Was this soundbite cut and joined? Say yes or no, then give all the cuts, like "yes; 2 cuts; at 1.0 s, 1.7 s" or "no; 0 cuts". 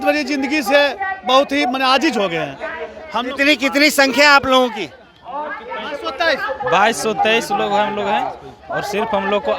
no; 0 cuts